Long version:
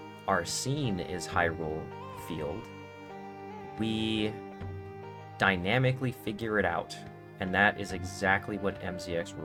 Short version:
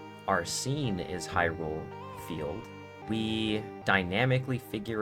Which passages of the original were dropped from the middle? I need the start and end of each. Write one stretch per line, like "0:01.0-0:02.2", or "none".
0:03.0-0:03.7
0:04.4-0:05.3